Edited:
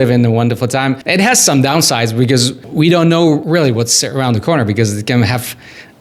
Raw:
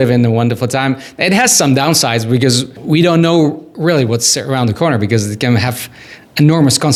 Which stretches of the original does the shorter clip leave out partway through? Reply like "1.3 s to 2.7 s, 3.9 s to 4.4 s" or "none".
1.0 s to 1.1 s, 3.6 s to 3.8 s